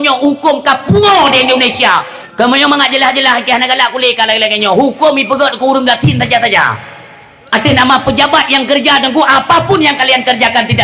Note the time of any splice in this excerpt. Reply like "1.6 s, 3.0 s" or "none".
2.2 s